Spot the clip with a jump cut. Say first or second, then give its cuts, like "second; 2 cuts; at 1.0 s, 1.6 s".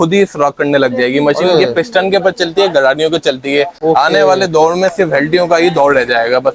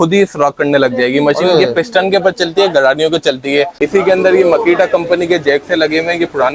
second; 1 cut; at 3.7 s